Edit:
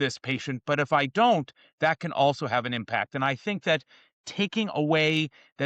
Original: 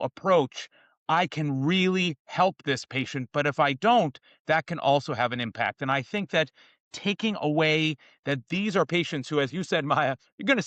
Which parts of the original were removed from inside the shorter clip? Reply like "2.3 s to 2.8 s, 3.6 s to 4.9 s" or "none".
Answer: none